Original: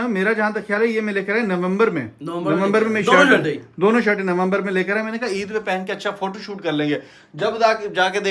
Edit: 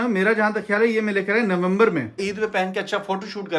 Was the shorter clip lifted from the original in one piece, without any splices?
no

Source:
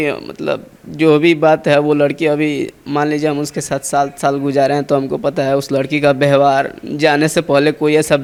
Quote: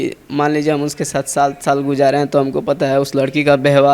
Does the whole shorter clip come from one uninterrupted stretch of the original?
yes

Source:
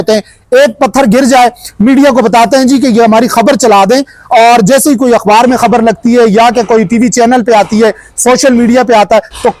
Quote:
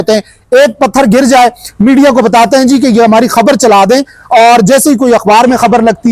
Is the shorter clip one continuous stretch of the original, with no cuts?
yes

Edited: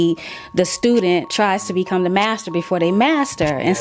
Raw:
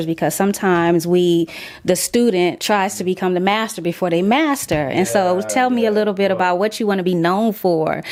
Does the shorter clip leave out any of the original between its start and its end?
no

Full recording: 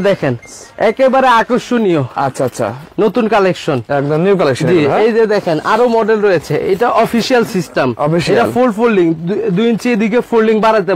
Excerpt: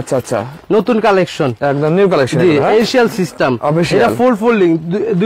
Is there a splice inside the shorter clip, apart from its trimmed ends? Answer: yes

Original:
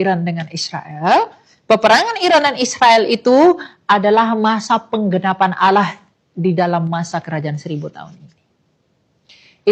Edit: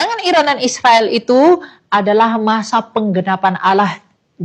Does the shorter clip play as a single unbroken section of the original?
yes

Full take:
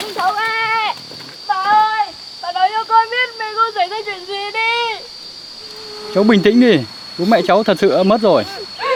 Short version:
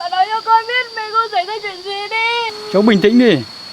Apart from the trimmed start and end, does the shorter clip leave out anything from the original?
yes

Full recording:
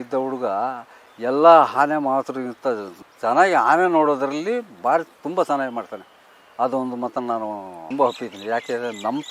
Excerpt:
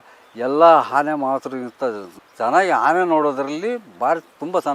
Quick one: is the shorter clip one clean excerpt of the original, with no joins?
yes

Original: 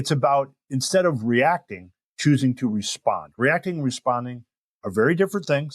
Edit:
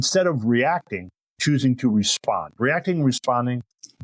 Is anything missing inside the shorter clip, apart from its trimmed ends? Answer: no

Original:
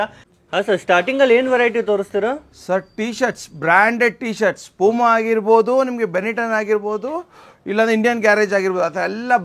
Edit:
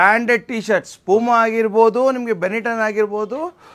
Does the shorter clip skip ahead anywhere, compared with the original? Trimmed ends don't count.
no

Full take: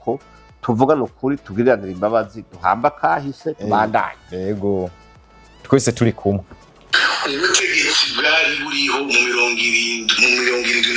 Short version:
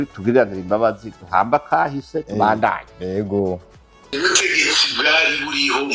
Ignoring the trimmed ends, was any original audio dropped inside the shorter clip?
yes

